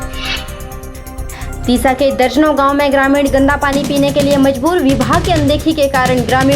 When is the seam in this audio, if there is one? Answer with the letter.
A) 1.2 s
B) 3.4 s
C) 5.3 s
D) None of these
D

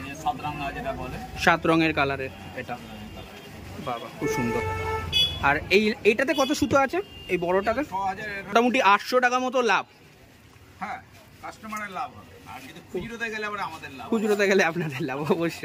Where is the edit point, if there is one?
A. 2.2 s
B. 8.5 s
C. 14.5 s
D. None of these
B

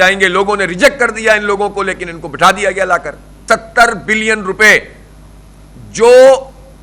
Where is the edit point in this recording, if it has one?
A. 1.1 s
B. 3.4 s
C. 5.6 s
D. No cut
B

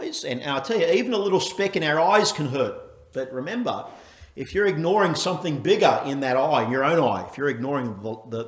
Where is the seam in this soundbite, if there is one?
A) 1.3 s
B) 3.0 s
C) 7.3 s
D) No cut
B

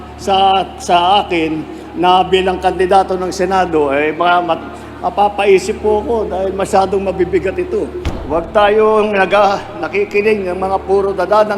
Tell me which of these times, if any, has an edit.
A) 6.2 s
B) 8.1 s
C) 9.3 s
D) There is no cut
B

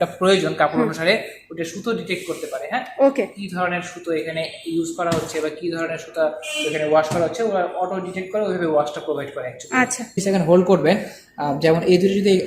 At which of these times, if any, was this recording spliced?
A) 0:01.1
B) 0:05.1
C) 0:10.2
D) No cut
C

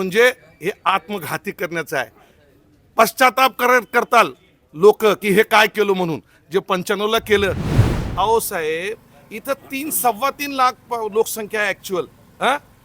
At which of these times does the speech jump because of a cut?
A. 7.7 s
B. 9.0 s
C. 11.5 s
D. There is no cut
A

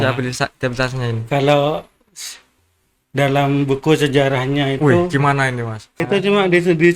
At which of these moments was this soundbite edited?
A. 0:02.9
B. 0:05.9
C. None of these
B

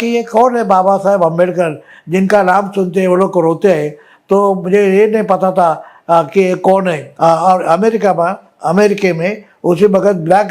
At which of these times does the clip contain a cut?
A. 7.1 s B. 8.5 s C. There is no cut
A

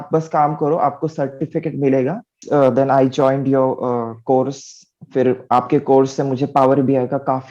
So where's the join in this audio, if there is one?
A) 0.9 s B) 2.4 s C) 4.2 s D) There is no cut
B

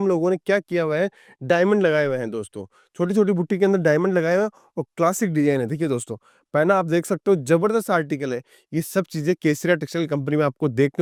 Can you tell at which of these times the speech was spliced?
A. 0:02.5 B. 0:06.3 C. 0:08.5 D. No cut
D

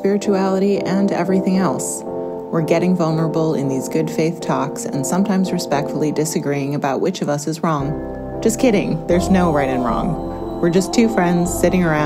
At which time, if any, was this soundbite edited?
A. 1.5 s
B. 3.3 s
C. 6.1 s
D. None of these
D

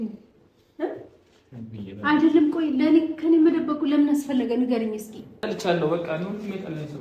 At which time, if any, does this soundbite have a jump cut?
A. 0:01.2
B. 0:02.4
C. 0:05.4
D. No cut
C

